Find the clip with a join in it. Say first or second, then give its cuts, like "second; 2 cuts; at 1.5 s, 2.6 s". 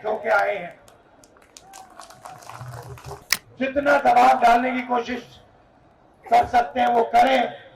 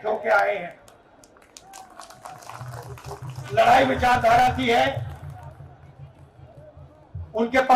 first; 1 cut; at 3.2 s